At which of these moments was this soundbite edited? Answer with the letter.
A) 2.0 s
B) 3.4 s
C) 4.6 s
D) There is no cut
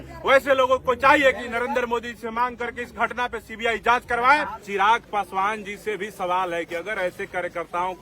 C